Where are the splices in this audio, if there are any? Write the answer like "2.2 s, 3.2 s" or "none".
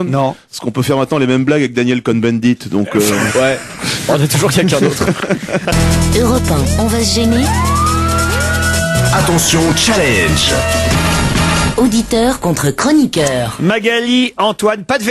12.4 s